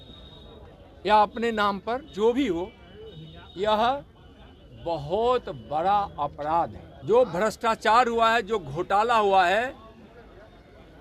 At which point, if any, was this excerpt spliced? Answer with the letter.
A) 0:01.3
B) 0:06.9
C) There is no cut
B